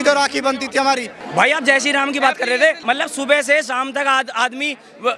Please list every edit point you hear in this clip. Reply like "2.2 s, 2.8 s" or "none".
1.2 s, 2.8 s

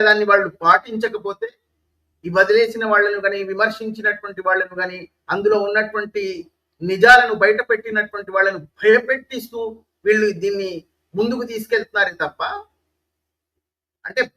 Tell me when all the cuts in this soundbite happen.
none

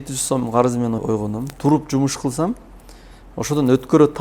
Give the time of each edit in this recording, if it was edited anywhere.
1.0 s

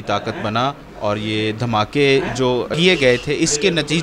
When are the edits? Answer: 2.7 s

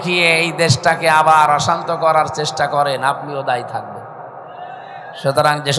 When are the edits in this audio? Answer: none

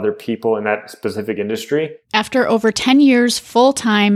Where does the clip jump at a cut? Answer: 2.0 s

